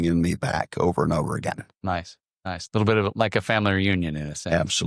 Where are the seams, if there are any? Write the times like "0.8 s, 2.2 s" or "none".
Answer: none